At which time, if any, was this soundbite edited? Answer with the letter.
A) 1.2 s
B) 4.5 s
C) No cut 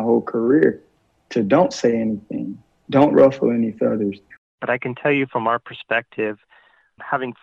B